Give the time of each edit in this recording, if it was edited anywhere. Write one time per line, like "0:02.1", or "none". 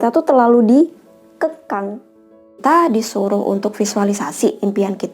0:02.6